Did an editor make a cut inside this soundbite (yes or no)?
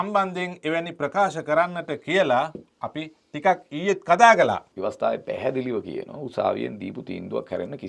yes